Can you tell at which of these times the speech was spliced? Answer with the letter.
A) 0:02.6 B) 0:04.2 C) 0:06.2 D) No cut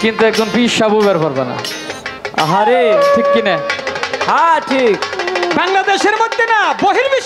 D